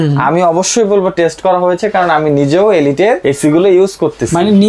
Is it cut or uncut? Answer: cut